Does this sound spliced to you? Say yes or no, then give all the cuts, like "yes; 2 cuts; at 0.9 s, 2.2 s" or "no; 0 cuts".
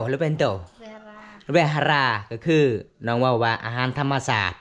no; 0 cuts